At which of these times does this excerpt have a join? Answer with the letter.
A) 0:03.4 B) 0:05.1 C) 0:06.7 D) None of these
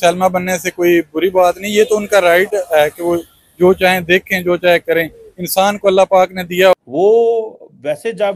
C